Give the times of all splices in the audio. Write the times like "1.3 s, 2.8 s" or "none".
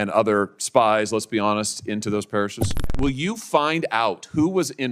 2.9 s